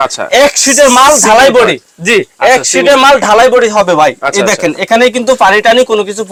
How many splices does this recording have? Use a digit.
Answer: 0